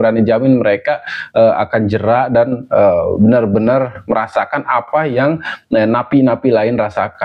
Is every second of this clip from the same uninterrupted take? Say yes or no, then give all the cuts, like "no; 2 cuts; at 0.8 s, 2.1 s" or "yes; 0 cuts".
yes; 0 cuts